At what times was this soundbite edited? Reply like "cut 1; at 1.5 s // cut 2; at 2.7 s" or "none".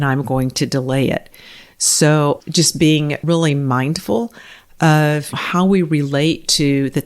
cut 1; at 3.2 s // cut 2; at 5.3 s